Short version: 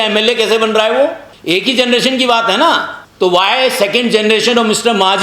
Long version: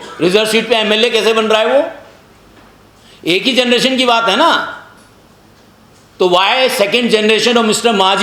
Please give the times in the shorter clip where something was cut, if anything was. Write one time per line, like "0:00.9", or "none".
0:01.3
0:03.0